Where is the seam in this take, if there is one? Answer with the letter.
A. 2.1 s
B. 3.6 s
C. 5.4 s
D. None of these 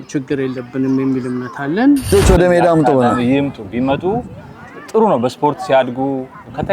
A